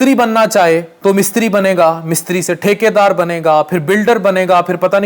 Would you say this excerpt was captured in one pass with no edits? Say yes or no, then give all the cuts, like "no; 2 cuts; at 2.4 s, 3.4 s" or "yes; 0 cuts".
no; 1 cut; at 0.9 s